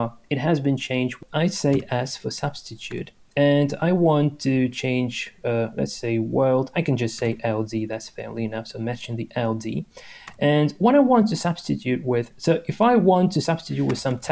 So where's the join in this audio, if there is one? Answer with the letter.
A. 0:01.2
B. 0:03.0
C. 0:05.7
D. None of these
A